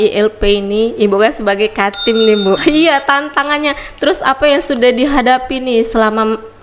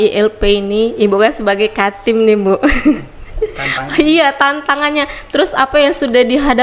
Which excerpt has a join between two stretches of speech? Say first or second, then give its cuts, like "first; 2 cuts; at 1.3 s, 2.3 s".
first; 1 cut; at 2.6 s